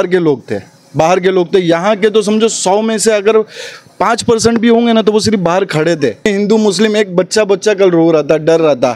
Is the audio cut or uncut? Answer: cut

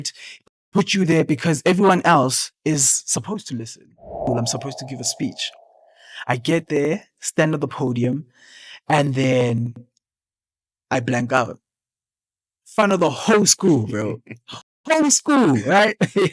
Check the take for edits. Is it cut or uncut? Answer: cut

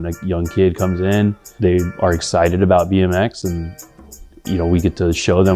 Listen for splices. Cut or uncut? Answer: cut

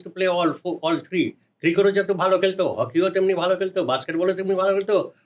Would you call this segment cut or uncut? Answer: uncut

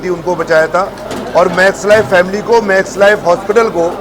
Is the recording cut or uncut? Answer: cut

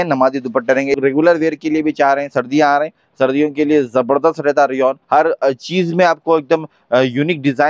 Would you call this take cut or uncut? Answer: cut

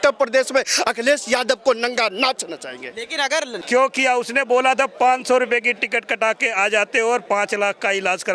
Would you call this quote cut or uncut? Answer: cut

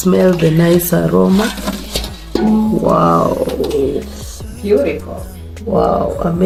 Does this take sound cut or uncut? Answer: uncut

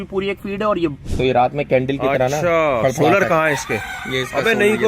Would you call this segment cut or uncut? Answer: cut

